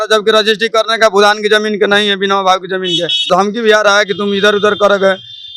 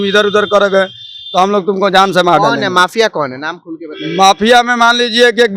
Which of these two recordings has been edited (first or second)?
first